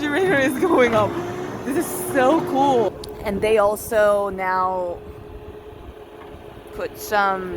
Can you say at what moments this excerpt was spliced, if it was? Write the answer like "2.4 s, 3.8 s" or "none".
2.9 s